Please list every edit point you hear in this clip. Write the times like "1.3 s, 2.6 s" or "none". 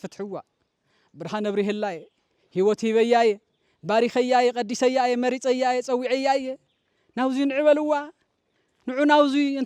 none